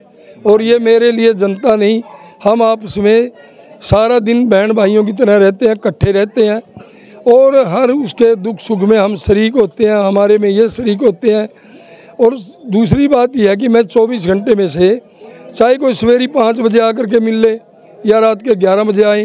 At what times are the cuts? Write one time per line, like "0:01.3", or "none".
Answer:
none